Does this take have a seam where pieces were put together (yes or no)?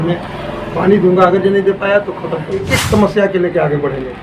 yes